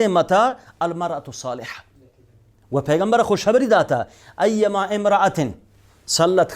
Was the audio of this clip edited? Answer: no; 0 cuts

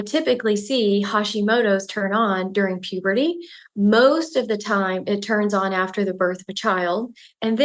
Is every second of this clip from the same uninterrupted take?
no; 1 cut; at 3.6 s

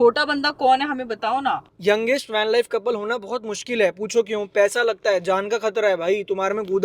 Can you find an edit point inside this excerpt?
yes; 1 cut; at 1.6 s

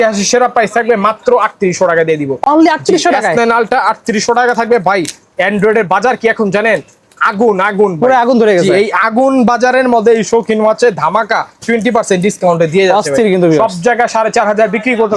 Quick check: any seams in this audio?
no; 0 cuts

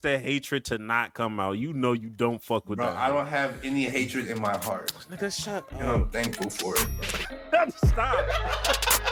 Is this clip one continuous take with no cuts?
yes; 0 cuts

